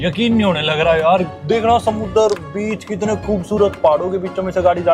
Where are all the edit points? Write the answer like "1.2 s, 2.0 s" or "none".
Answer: 1.3 s